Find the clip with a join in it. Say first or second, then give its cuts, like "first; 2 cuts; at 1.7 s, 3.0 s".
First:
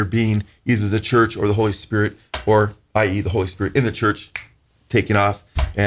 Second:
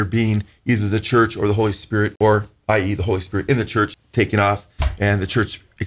second; 2 cuts; at 2.1 s, 4.0 s